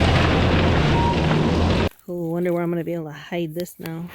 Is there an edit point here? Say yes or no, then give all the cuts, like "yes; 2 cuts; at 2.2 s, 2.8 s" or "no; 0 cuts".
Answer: yes; 1 cut; at 1.9 s